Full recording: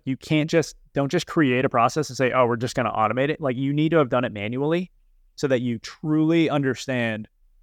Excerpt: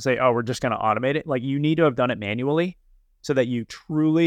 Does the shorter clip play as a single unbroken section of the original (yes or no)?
yes